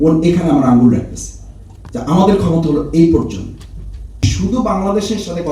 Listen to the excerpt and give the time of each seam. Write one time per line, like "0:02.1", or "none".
0:04.3